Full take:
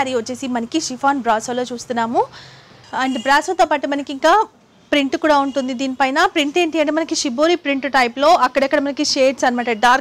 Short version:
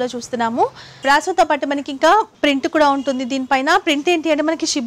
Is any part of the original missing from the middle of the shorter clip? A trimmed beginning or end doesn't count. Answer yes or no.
yes